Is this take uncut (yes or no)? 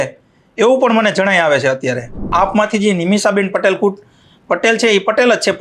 no